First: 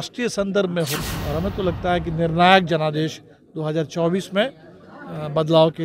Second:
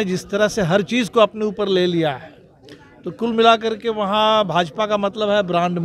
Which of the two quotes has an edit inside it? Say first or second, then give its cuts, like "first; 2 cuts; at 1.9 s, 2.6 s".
first; 1 cut; at 1.0 s